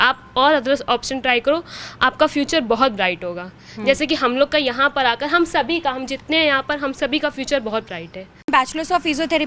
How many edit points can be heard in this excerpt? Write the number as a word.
one